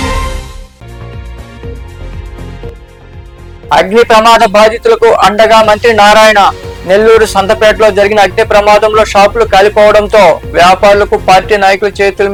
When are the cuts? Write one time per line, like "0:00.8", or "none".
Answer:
none

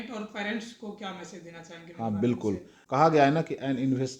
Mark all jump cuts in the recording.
0:02.7

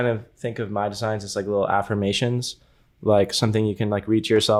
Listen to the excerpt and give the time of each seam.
none

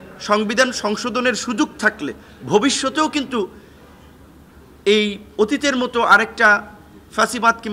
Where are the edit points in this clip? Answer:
none

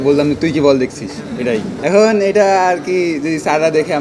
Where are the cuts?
0:01.7

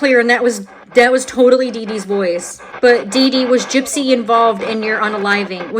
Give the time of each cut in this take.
0:02.6

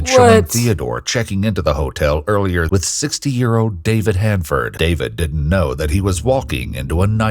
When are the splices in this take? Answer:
0:02.7
0:04.7

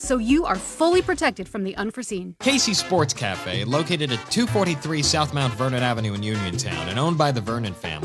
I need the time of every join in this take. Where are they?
0:02.4

